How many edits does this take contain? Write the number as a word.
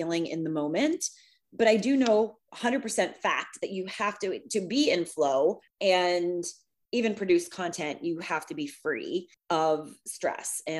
two